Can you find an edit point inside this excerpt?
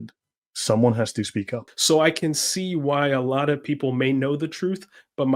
yes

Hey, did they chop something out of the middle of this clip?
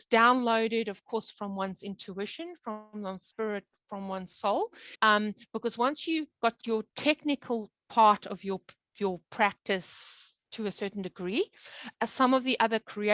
yes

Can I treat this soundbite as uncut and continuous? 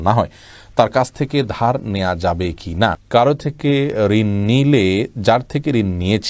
no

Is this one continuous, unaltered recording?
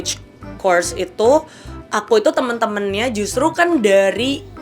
yes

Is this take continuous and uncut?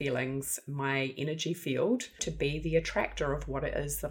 no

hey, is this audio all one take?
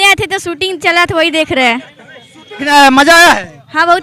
no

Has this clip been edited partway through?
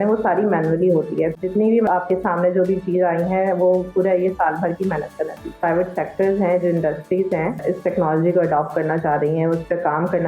yes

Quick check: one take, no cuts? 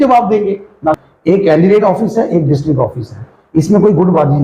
no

